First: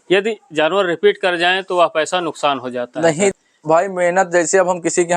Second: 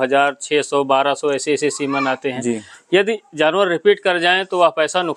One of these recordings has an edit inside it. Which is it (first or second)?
first